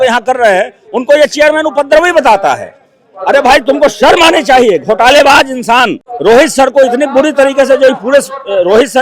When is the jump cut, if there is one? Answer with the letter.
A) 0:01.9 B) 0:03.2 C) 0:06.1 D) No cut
C